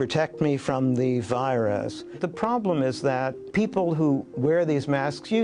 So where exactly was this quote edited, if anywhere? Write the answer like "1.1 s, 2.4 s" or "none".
2.2 s